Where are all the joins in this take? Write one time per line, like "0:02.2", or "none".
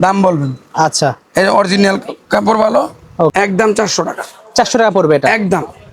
0:03.3